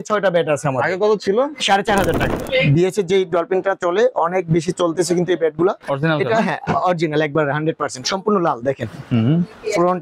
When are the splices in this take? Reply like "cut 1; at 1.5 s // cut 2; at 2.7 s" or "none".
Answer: cut 1; at 2.3 s

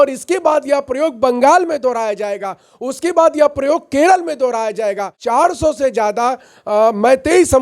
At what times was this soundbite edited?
cut 1; at 5.2 s

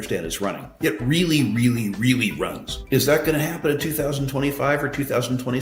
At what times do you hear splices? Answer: none

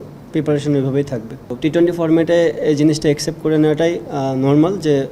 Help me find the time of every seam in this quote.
cut 1; at 1.3 s

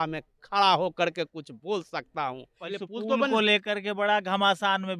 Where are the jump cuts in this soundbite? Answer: cut 1; at 2.6 s

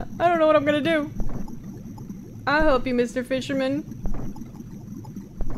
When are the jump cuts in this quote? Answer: cut 1; at 4.6 s

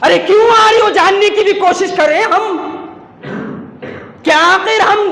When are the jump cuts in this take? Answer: none

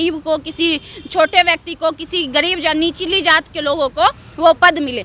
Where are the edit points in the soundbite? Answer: none

